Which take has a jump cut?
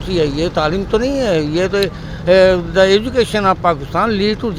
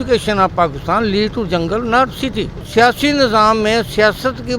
second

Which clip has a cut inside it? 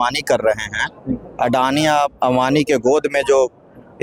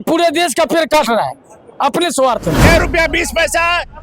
second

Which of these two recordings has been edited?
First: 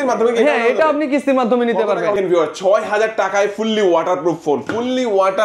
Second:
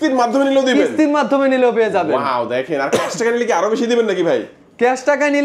first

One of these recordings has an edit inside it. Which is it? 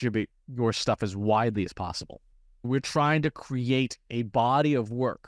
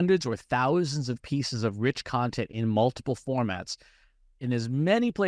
first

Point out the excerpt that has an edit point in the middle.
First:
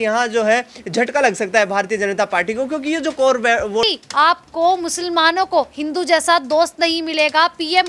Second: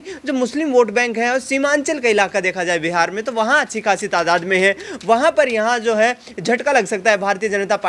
first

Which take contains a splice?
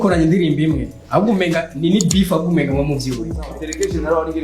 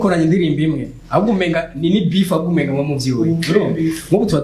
first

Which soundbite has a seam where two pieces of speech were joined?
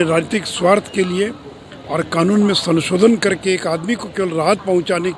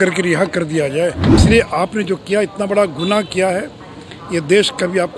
second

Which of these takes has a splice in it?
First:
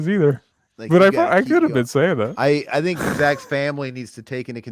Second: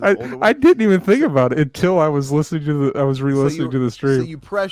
first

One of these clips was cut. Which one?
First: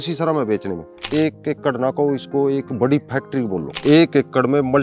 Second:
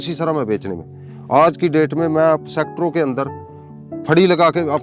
first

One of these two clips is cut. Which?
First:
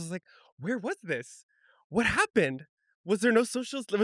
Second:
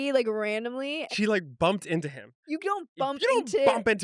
second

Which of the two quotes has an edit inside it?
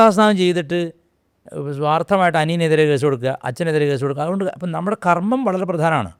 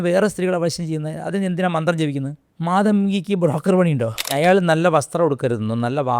second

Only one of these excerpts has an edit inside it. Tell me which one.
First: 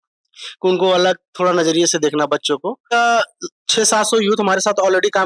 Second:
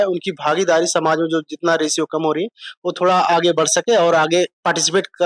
first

